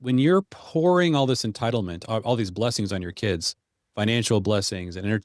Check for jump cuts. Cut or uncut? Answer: cut